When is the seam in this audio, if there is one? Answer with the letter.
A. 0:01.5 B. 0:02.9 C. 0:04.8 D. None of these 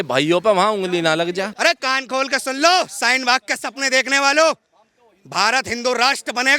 A